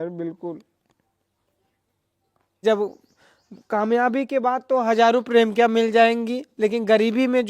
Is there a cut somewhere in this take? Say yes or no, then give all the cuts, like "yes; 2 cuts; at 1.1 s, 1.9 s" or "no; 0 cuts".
yes; 1 cut; at 2.6 s